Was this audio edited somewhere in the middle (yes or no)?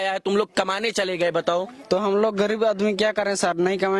no